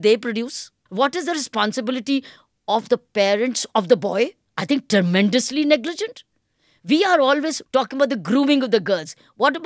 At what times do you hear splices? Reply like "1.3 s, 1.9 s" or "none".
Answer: 0.8 s, 4.5 s, 7.6 s